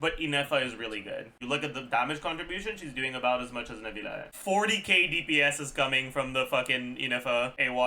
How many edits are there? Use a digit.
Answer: 2